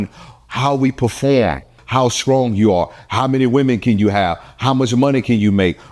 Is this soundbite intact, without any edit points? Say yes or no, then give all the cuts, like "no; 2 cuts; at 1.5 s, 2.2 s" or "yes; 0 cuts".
no; 1 cut; at 1.8 s